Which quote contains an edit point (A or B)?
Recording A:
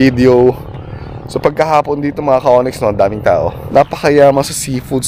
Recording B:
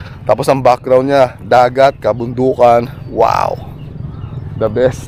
A